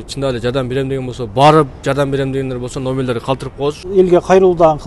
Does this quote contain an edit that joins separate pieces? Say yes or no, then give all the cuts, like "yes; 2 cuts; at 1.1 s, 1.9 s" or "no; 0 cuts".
yes; 1 cut; at 3.8 s